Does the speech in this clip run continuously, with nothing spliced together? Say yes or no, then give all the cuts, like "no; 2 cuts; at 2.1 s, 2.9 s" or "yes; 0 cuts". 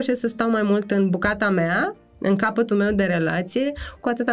yes; 0 cuts